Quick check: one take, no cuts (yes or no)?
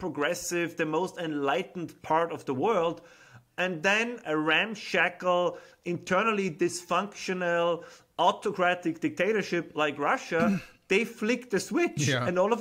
no